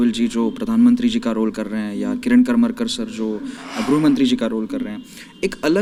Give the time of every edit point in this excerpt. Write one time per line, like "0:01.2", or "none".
none